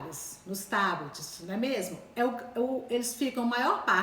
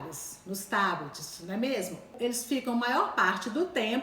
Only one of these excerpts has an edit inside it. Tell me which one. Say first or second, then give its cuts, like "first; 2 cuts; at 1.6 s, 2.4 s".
second; 1 cut; at 2.1 s